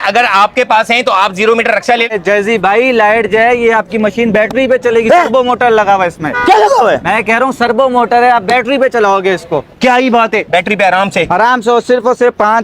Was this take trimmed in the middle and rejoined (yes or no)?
yes